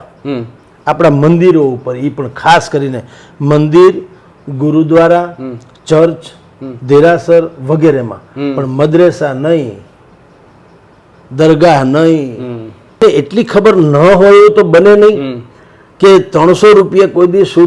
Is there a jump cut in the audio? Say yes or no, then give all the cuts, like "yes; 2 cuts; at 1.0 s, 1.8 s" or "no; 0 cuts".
yes; 1 cut; at 13.0 s